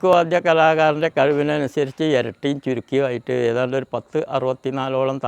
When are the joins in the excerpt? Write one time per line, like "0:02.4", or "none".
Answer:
none